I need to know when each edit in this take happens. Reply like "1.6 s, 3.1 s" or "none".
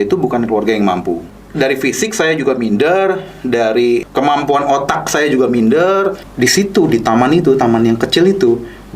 1.4 s, 4.1 s, 6.2 s